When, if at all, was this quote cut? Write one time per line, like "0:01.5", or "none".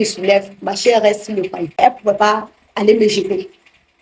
0:01.8